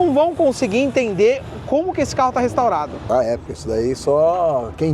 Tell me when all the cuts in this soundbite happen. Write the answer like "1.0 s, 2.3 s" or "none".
3.0 s